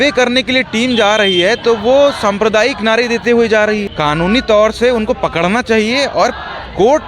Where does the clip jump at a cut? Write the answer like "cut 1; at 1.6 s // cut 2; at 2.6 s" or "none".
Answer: cut 1; at 3.9 s